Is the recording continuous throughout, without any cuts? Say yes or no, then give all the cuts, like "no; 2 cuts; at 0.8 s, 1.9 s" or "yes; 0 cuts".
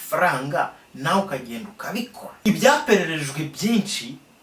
no; 1 cut; at 2.2 s